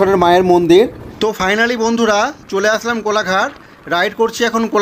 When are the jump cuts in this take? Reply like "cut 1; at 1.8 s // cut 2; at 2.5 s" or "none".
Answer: cut 1; at 1.3 s